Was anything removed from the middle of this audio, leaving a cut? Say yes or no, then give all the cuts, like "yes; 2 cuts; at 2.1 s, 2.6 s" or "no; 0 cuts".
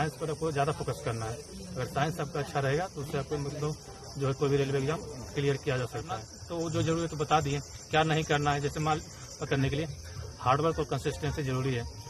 yes; 2 cuts; at 6.4 s, 9.5 s